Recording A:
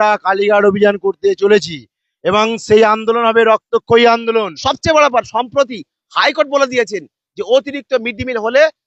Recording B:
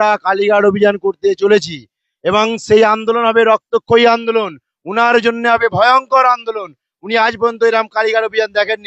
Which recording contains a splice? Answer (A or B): A